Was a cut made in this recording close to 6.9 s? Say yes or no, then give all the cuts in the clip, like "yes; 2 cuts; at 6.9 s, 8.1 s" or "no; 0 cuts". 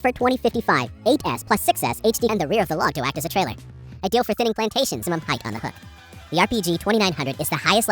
no; 2 cuts; at 2.3 s, 5.0 s